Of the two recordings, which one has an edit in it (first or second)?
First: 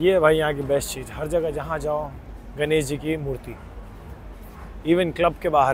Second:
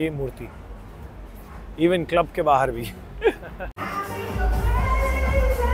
second